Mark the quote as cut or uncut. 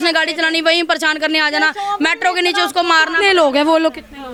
uncut